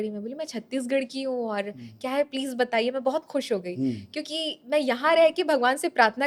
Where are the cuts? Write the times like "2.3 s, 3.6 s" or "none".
none